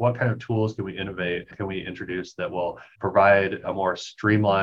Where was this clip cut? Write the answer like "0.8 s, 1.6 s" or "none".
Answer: 2.9 s

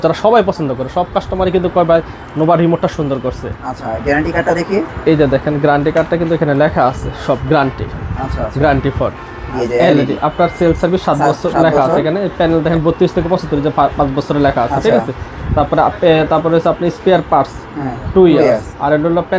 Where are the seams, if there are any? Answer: 9.6 s

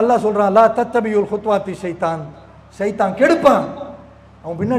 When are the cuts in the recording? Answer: none

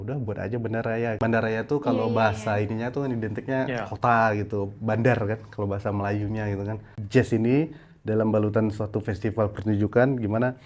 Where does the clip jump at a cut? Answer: 1.2 s, 6.9 s

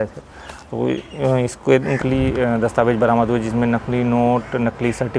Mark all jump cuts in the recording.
2.0 s

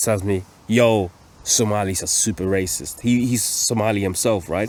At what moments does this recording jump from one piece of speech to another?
none

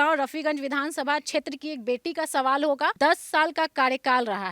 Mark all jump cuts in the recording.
2.9 s

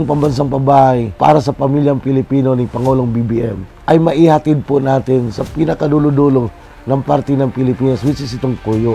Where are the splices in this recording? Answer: 1.1 s, 3.7 s

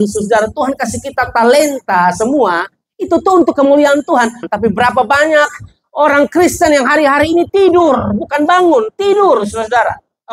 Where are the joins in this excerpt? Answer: 4.5 s

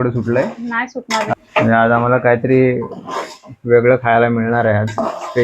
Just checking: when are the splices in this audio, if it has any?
1.3 s

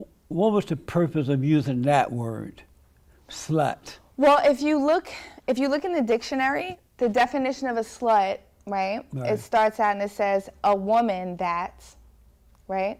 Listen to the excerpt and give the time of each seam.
none

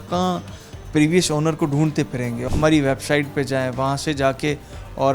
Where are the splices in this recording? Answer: 2.4 s

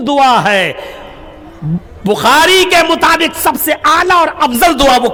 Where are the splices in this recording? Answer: none

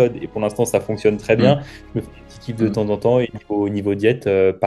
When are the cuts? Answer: none

